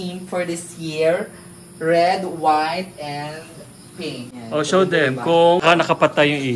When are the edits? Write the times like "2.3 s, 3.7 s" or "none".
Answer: 4.3 s, 5.6 s

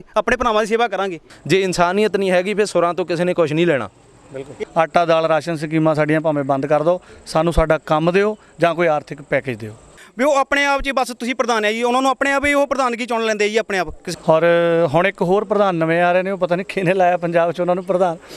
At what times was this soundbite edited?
1.3 s, 4.5 s, 10.0 s, 14.0 s

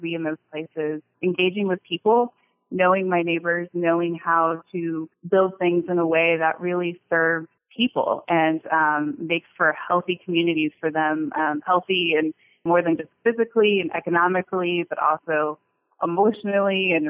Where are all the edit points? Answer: 1.1 s, 5.1 s, 7.6 s, 12.6 s

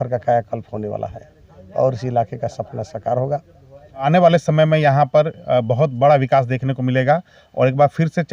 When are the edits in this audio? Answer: 4.0 s

